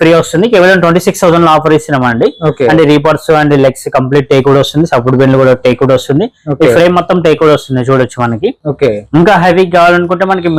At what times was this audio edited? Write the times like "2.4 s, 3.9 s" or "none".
none